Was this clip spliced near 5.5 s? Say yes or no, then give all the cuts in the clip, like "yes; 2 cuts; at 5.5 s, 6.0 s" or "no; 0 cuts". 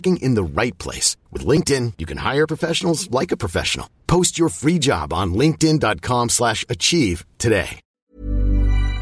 no; 1 cut; at 7.9 s